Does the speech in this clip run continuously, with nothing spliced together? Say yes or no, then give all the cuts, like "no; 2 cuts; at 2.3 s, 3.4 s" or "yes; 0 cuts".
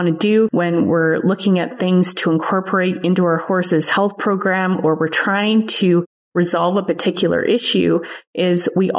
yes; 0 cuts